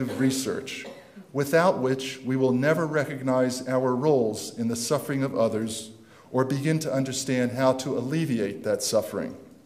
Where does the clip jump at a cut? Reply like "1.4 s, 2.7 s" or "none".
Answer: none